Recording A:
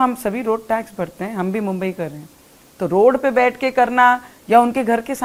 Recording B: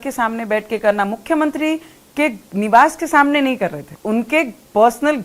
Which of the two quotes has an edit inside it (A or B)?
B